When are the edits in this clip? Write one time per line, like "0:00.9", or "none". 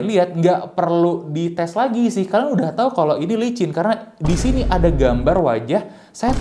none